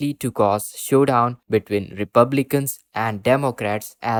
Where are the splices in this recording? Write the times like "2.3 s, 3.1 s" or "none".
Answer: none